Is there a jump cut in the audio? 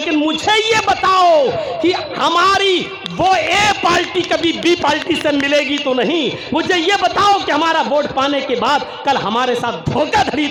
no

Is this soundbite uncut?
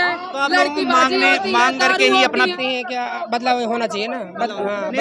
no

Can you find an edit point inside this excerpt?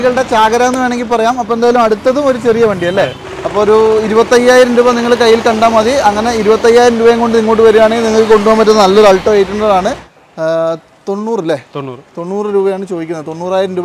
yes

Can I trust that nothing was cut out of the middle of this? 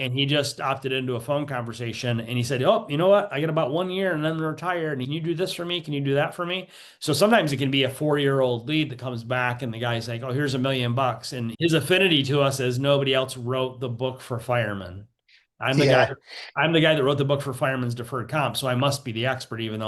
no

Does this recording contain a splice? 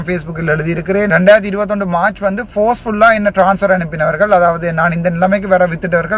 yes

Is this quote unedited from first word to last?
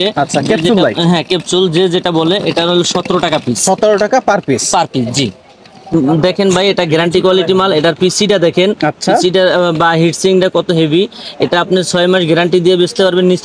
yes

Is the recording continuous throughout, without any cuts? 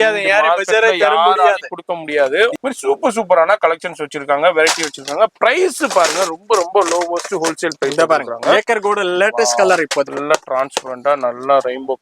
no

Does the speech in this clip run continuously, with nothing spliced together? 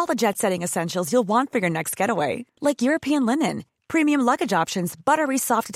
yes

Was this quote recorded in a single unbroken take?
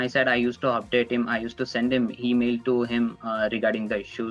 yes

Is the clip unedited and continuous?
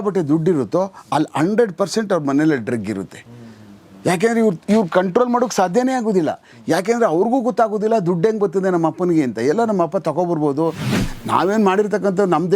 no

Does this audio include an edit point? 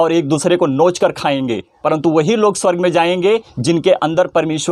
yes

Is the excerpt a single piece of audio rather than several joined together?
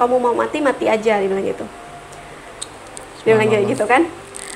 yes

